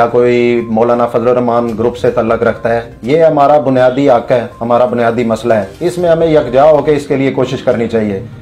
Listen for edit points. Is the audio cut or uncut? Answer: uncut